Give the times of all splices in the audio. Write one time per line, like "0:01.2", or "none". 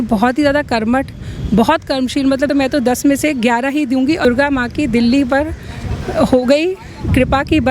0:02.5
0:04.2